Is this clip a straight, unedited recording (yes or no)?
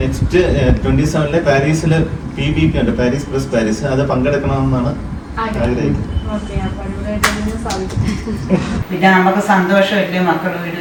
yes